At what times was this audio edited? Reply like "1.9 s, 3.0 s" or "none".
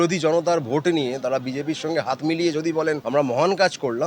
3.0 s